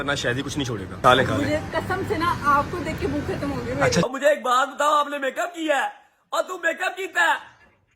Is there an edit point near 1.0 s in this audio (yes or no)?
yes